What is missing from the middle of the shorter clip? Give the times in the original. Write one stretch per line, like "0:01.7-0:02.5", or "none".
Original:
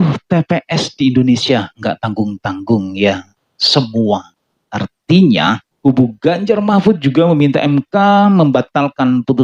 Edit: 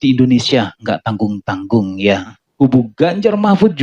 0:03.4-0:05.7